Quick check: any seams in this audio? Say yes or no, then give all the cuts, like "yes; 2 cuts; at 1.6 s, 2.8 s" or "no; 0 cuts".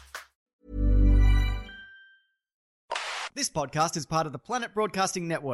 yes; 1 cut; at 2.7 s